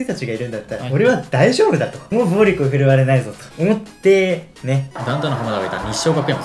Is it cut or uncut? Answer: cut